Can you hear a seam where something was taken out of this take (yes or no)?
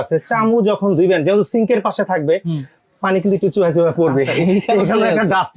no